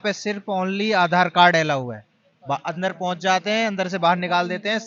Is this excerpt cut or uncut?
uncut